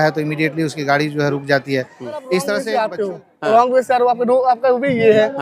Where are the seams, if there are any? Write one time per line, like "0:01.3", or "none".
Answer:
0:02.6